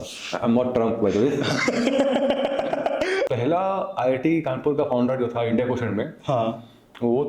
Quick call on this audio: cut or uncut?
cut